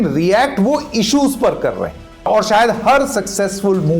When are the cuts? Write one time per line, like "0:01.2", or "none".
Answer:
0:02.3